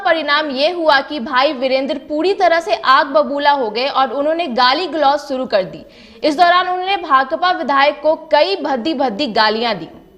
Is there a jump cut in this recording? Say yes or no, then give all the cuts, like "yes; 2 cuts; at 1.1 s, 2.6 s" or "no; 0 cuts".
no; 0 cuts